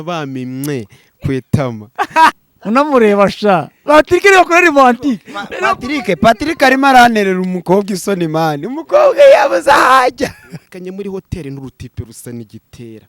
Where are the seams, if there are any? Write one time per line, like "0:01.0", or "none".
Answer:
0:02.3
0:10.6